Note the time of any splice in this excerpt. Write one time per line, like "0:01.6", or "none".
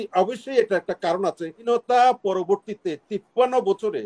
0:01.6